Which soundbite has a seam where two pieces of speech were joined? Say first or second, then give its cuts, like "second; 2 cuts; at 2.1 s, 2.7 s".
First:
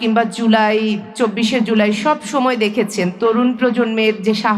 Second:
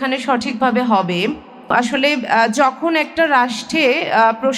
second; 1 cut; at 1.7 s